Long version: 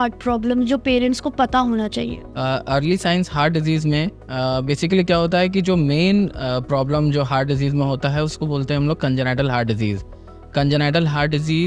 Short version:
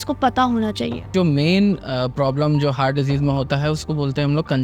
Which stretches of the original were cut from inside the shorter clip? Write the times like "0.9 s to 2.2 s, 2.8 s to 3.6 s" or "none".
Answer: 2.3 s to 5.6 s